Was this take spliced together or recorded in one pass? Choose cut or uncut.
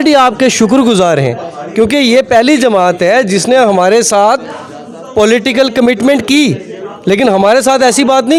uncut